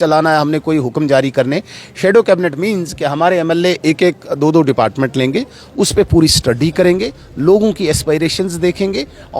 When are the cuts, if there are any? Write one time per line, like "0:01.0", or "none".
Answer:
none